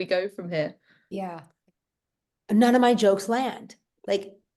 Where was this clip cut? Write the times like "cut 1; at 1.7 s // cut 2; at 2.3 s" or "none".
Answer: cut 1; at 1.5 s